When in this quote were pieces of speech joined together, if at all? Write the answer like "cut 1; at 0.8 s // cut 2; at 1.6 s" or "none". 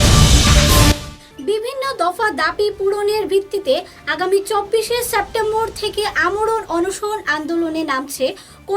cut 1; at 0.9 s